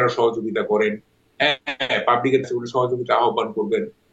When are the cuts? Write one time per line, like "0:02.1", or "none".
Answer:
none